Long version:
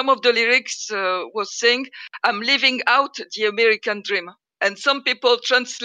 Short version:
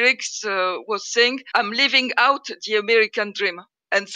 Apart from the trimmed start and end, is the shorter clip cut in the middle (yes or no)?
yes